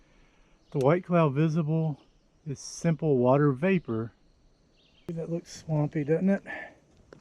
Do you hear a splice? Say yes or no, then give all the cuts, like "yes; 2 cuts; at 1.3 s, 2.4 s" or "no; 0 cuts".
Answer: yes; 1 cut; at 5.1 s